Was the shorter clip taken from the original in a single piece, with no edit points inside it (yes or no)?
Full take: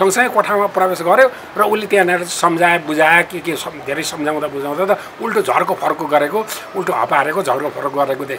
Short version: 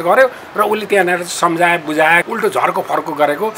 no